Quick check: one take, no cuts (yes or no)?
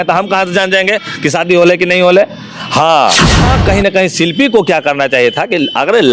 no